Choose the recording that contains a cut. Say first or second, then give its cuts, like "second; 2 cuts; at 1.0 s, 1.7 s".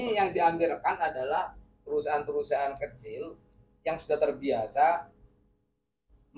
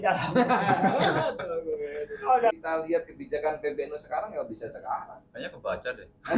second; 1 cut; at 2.5 s